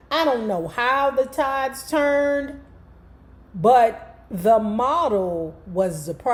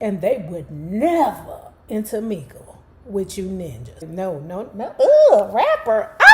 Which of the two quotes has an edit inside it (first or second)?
second